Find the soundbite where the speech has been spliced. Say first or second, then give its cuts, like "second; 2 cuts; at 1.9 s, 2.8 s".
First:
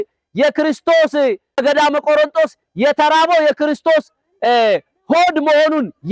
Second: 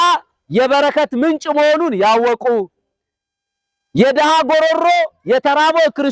first; 1 cut; at 1.6 s